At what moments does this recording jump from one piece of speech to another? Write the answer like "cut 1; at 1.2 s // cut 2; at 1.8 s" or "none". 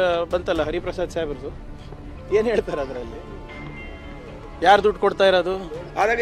none

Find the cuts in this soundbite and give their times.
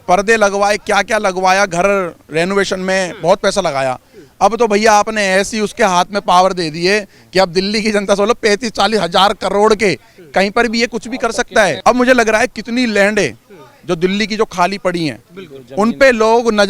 none

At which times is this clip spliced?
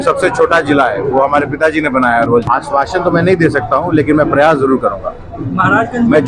cut 1; at 2.4 s

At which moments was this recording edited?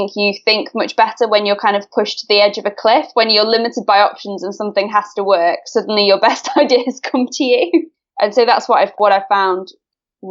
cut 1; at 8.9 s

